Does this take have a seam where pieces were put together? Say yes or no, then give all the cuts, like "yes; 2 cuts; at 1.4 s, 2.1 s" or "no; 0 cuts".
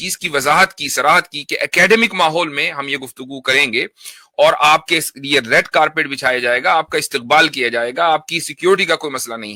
no; 0 cuts